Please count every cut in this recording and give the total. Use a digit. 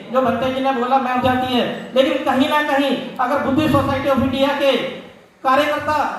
1